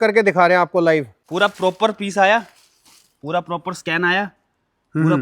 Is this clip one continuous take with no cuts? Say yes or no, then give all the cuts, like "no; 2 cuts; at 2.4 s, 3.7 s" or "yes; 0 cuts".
no; 1 cut; at 1.2 s